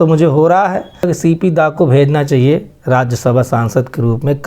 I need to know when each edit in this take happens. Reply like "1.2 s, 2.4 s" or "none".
1.1 s